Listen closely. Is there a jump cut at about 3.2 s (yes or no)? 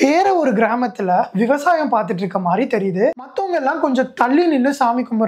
yes